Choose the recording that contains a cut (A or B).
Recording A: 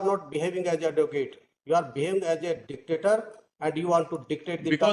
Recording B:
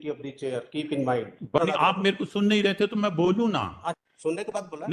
B